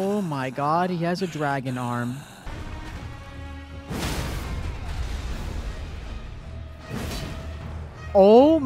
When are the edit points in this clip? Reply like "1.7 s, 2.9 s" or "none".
2.5 s